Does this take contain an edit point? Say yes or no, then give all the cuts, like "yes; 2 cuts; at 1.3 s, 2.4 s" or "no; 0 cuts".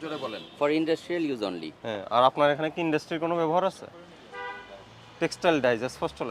no; 0 cuts